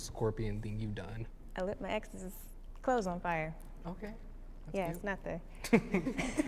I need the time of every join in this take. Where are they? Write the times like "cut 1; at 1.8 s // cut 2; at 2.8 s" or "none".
none